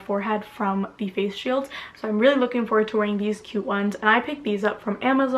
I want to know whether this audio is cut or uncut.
uncut